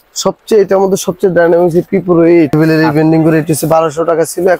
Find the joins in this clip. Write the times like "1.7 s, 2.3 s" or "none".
2.5 s